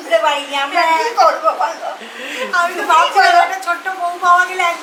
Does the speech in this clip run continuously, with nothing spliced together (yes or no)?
yes